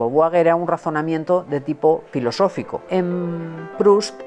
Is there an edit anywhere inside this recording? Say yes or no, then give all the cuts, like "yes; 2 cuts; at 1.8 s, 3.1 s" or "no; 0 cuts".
yes; 1 cut; at 2.6 s